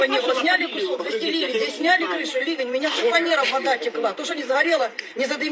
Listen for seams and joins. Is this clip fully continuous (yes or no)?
yes